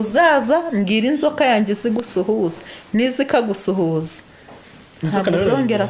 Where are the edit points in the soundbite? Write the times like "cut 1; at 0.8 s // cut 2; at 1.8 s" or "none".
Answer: none

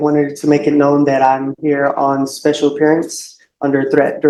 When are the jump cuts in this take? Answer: none

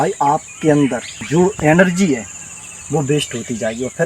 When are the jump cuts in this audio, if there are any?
cut 1; at 1.1 s

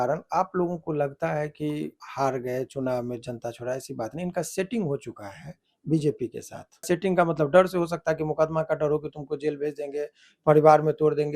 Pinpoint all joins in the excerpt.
cut 1; at 2.0 s // cut 2; at 6.8 s

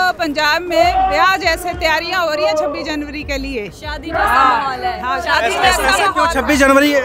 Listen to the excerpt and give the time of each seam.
none

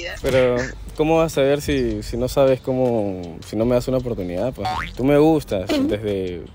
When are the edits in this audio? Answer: cut 1; at 4.9 s

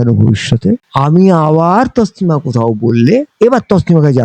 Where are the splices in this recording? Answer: none

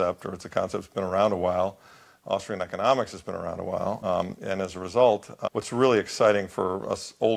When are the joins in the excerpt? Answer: cut 1; at 4.0 s // cut 2; at 5.3 s

